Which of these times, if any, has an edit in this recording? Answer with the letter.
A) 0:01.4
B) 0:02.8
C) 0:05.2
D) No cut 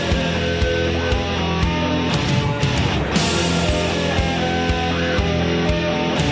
C